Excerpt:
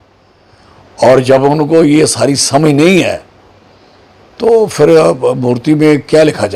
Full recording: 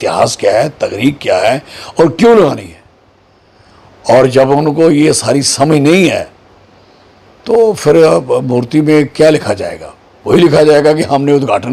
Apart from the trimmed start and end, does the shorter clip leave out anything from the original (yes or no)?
no